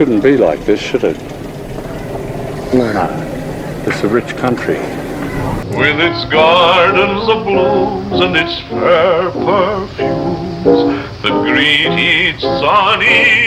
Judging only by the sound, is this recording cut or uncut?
cut